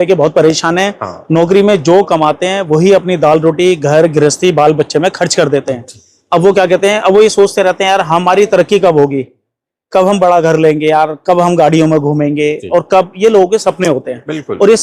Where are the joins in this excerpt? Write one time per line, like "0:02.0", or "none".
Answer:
none